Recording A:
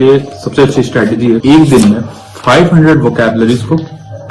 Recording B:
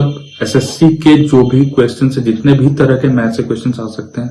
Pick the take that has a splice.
A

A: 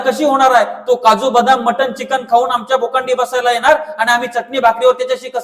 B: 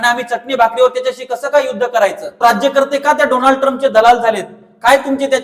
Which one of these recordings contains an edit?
B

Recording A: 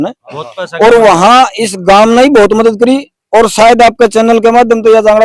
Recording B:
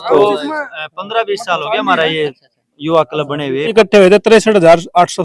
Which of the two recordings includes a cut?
B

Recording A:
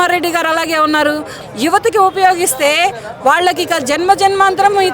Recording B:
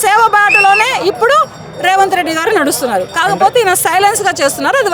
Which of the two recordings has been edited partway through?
A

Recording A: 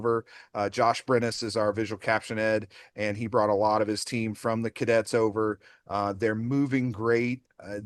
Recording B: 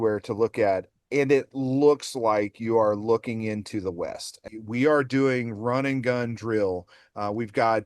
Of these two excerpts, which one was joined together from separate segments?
B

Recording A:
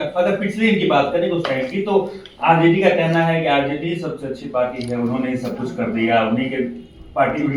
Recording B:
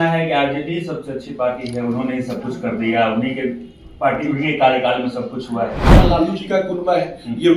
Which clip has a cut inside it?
B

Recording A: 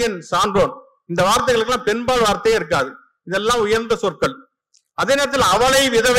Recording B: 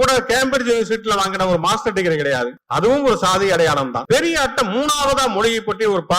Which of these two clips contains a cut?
B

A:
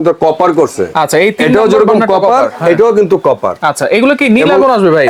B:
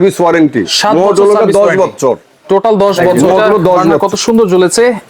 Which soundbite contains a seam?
B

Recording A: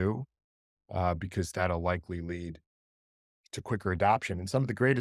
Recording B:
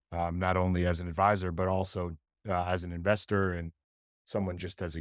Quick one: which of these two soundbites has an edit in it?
A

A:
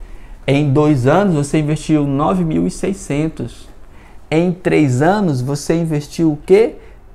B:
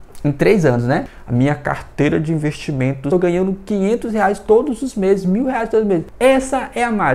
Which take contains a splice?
B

